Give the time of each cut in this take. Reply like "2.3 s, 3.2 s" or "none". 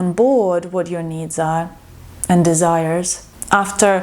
none